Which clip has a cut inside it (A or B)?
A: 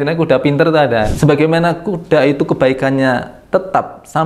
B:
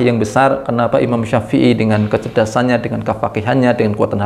A